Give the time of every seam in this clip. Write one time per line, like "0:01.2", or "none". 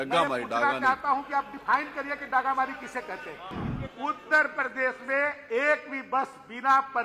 0:03.5